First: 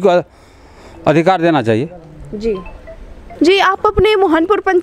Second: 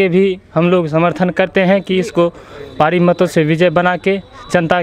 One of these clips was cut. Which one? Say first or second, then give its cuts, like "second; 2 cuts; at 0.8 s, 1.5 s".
first; 1 cut; at 3.4 s